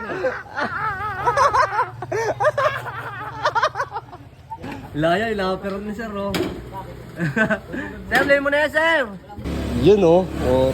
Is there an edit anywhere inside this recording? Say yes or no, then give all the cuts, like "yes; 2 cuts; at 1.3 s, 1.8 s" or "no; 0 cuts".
yes; 2 cuts; at 4.6 s, 9.4 s